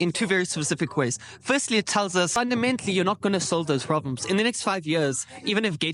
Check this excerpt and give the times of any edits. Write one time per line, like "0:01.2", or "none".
0:02.3